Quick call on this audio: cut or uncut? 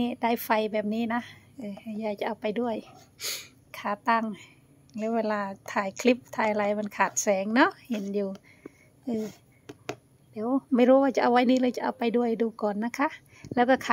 uncut